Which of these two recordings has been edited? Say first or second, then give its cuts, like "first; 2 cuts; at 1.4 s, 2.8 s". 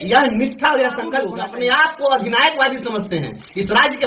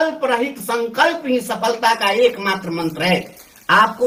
first; 1 cut; at 1.3 s